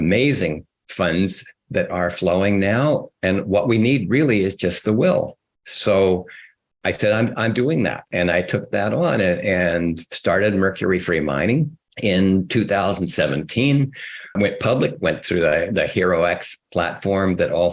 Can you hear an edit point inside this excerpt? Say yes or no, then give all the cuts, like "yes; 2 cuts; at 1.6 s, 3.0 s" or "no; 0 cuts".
yes; 3 cuts; at 3.1 s, 8.1 s, 11.8 s